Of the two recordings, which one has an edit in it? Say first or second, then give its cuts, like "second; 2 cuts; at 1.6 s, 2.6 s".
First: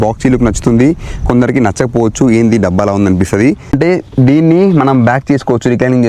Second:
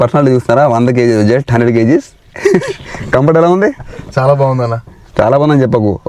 first; 1 cut; at 3.7 s